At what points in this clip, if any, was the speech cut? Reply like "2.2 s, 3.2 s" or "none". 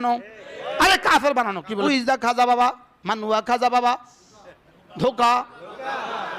1.9 s